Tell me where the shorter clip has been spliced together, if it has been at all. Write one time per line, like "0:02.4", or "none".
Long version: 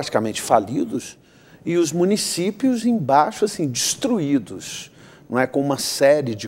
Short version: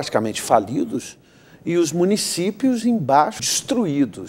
0:03.4

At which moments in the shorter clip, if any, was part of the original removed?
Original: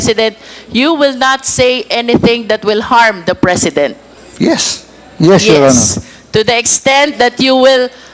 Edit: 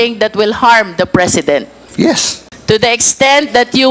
0:02.1

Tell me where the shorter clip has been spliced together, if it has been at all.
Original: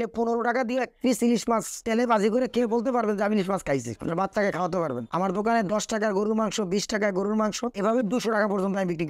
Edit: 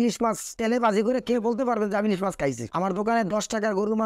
0:02.7

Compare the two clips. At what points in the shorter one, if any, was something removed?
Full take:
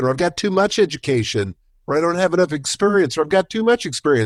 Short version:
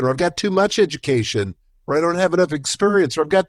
none

